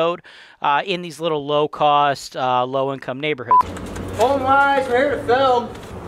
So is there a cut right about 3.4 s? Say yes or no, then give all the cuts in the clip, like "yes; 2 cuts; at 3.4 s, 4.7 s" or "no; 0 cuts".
yes; 1 cut; at 3.4 s